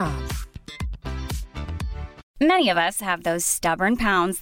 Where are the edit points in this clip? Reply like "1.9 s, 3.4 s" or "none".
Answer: 2.2 s

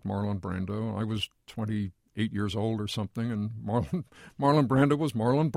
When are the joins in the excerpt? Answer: 2.0 s

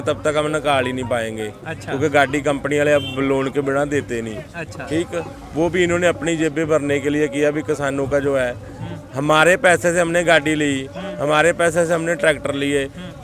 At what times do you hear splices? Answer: none

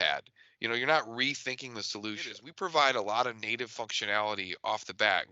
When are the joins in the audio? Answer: 2.5 s

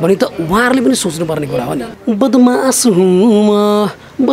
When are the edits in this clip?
1.9 s

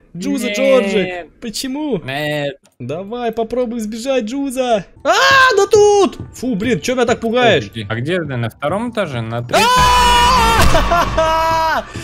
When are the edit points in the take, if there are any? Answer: 2.7 s, 4.9 s, 7.9 s

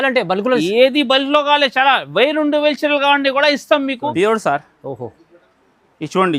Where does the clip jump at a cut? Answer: 4.0 s

